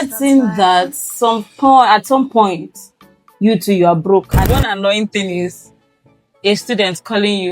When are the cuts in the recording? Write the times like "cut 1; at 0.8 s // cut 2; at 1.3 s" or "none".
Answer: cut 1; at 4.3 s